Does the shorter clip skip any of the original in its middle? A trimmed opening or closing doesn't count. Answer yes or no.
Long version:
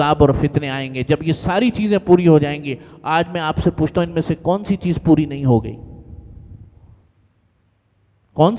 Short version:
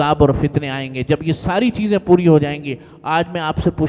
no